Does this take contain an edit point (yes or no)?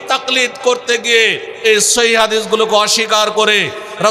no